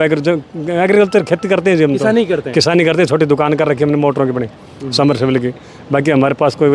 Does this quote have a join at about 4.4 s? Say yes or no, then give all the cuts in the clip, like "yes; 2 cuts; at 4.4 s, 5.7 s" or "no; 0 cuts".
no; 0 cuts